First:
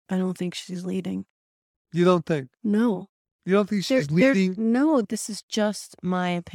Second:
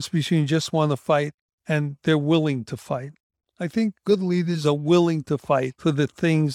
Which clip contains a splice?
first; 1 cut; at 5.2 s

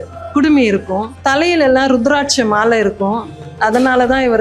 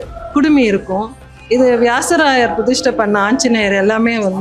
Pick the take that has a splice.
first; 1 cut; at 1.1 s

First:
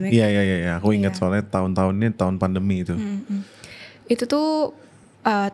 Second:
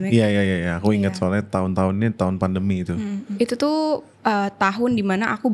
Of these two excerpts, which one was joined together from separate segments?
second; 2 cuts; at 3.3 s, 4.1 s

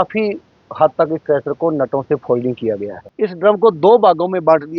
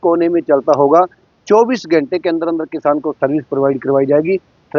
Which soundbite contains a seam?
first; 1 cut; at 3.0 s

